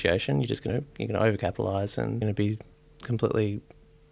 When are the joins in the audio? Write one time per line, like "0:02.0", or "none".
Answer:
0:02.2